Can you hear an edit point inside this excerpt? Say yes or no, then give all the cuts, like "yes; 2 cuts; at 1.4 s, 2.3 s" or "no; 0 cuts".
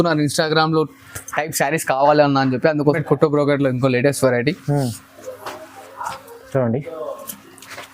yes; 1 cut; at 3.0 s